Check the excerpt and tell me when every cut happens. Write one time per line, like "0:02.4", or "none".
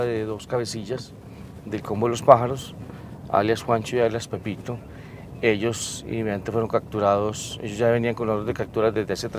0:03.9